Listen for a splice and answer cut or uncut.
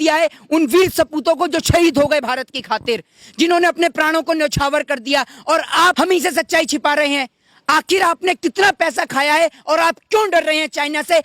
cut